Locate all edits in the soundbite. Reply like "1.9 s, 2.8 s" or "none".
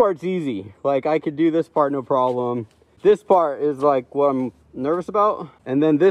none